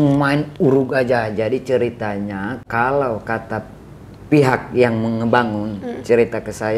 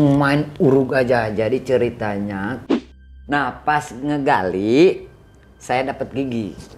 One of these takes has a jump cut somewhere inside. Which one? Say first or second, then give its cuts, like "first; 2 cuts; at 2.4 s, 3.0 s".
second; 1 cut; at 2.8 s